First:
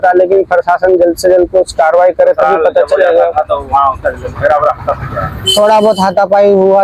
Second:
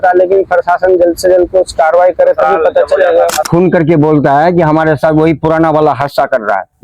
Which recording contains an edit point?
second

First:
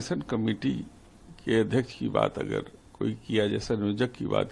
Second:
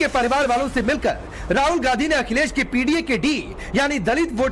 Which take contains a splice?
first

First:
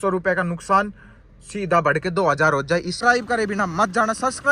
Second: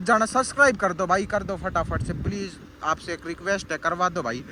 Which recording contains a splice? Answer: first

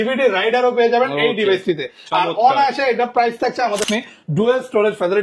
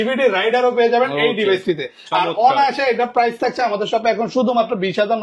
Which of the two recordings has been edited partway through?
first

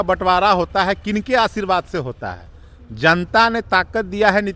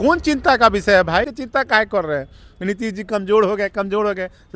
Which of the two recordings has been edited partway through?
second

